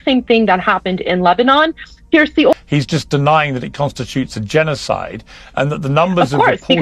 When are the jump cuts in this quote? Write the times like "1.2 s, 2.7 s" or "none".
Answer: 2.5 s